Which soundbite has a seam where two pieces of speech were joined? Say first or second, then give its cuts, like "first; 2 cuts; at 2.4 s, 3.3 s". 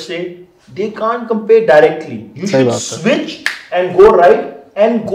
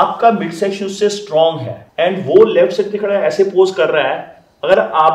second; 1 cut; at 1.8 s